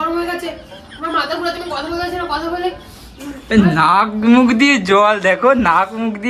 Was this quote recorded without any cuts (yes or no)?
yes